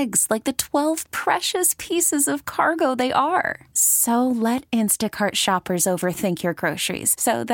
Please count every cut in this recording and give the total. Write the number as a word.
zero